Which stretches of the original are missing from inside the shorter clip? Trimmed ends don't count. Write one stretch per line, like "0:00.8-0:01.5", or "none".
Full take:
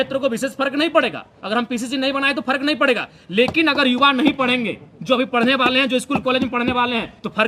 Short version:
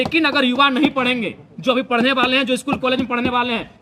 none